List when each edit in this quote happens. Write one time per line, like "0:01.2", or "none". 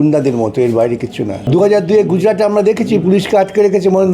0:01.4